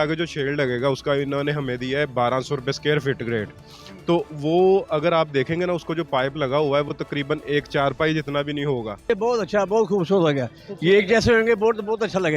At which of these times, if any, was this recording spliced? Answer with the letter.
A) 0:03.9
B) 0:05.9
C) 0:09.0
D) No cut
C